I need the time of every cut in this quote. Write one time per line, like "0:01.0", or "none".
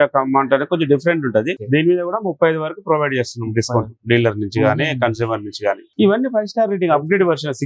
0:01.6
0:05.9

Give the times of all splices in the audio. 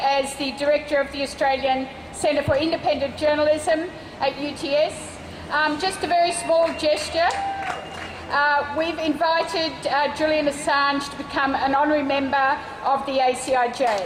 none

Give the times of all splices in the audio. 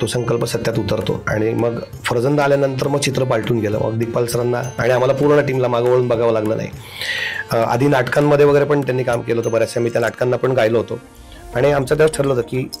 none

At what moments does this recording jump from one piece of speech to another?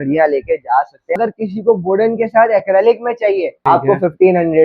0:01.2
0:03.5

